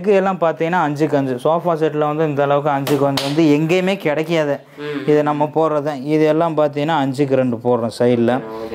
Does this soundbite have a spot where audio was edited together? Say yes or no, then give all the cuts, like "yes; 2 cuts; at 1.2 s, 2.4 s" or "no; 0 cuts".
no; 0 cuts